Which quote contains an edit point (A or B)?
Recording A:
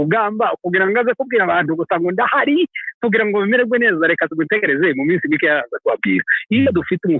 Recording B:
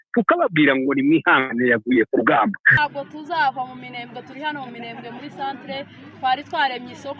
B